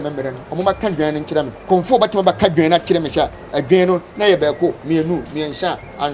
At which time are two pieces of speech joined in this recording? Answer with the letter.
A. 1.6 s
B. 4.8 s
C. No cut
A